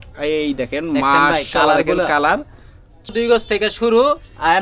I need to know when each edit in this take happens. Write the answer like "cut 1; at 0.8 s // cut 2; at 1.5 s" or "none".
cut 1; at 3.1 s